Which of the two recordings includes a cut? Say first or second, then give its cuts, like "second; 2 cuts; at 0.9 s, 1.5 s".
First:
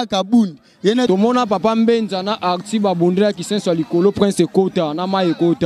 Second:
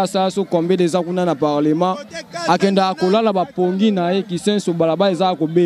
first; 1 cut; at 1.1 s